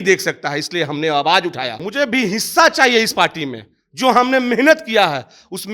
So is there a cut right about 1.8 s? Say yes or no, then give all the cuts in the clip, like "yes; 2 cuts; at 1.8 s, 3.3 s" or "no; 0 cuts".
yes; 1 cut; at 1.8 s